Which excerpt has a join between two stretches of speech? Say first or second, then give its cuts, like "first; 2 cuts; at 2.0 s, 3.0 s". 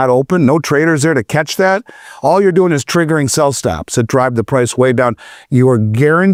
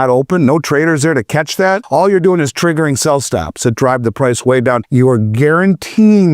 second; 2 cuts; at 1.8 s, 4.8 s